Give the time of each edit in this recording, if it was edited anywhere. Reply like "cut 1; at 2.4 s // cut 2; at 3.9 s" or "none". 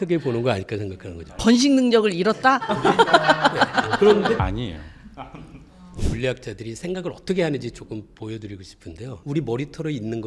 cut 1; at 4.4 s // cut 2; at 5.9 s